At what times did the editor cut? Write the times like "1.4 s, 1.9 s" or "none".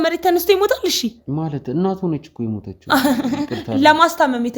1.2 s